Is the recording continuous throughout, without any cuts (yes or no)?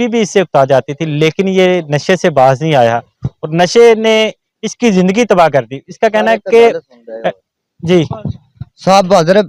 yes